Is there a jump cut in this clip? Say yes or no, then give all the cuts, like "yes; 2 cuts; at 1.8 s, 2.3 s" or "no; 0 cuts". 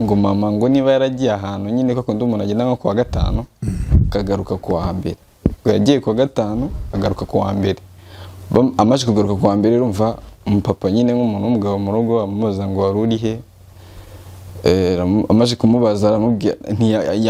no; 0 cuts